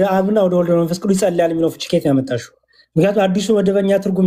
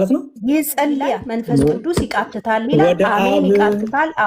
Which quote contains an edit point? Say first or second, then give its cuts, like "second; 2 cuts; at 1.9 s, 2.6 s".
second; 1 cut; at 1.3 s